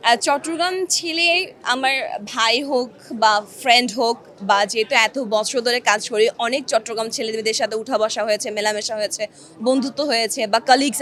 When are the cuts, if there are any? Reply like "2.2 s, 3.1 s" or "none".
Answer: none